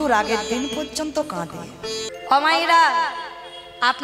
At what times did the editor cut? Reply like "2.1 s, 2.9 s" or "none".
2.1 s